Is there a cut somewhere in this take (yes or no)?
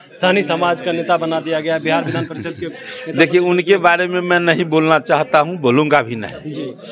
no